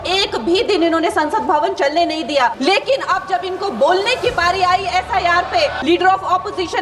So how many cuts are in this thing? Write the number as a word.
two